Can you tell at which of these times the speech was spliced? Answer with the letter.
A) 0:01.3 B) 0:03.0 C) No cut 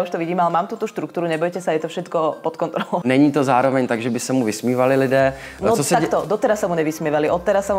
B